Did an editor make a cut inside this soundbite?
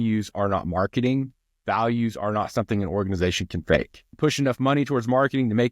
yes; 1 cut; at 4.0 s

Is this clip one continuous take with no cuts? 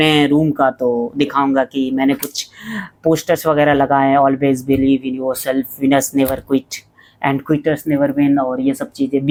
yes; 0 cuts

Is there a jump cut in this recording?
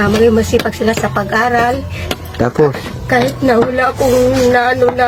no; 0 cuts

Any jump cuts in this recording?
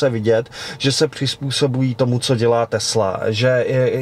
no; 0 cuts

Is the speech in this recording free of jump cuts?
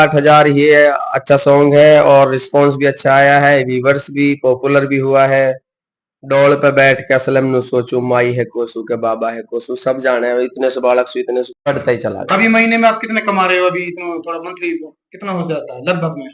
no; 1 cut; at 11.5 s

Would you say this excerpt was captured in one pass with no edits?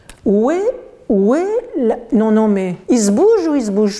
no; 1 cut; at 2.8 s

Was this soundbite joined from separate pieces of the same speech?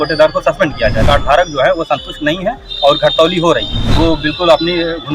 yes; 2 cuts; at 1.0 s, 3.8 s

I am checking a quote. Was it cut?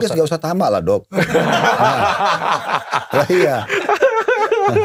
no; 0 cuts

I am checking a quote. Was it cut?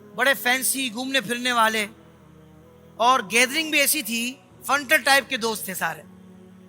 yes; 1 cut; at 4.5 s

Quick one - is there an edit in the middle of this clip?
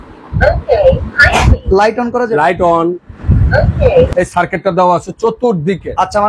yes; 1 cut; at 4.1 s

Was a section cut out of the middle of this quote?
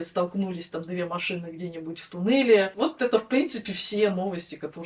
yes; 1 cut; at 2.7 s

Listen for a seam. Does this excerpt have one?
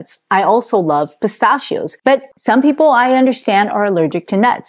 yes; 1 cut; at 2.3 s

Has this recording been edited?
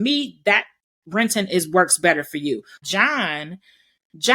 yes; 1 cut; at 2.8 s

